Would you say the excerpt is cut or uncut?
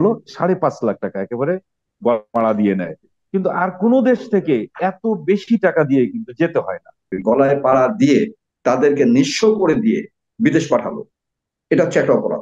cut